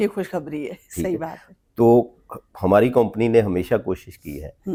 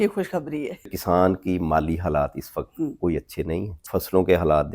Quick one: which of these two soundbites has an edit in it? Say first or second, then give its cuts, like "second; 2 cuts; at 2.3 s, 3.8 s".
second; 2 cuts; at 0.9 s, 3.8 s